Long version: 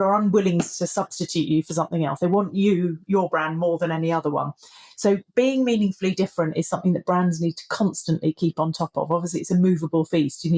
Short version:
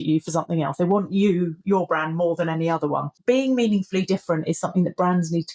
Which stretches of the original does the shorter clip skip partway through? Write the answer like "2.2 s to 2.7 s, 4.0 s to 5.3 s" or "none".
4.6 s to 5.3 s